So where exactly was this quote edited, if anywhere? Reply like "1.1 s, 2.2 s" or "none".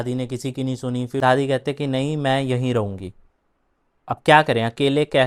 1.1 s